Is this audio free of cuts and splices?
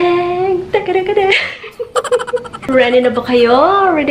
no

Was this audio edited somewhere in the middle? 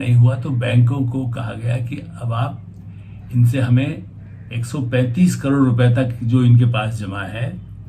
no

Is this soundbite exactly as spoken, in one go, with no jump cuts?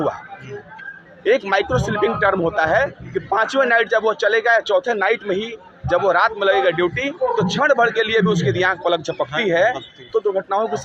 yes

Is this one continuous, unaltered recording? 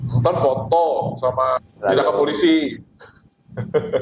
no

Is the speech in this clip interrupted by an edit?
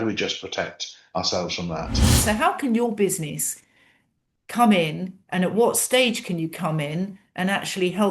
yes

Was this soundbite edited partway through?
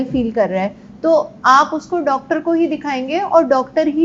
no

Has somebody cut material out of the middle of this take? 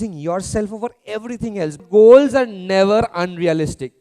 yes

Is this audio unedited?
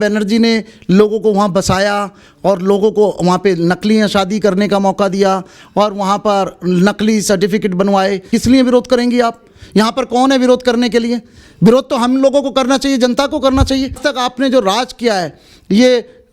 no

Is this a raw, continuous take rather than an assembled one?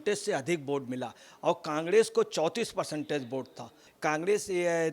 no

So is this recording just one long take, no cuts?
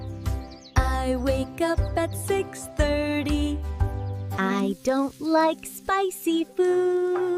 no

